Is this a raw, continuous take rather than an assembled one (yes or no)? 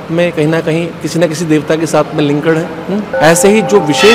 no